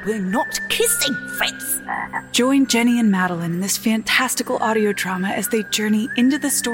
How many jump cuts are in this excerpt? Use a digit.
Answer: 1